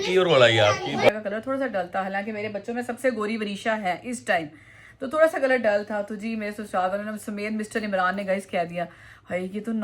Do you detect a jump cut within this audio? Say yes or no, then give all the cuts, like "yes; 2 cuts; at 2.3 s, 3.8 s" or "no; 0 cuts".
yes; 1 cut; at 1.1 s